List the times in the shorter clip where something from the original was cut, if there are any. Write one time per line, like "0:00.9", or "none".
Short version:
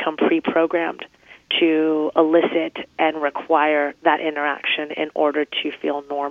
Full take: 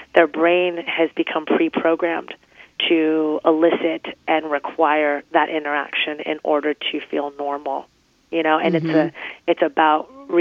none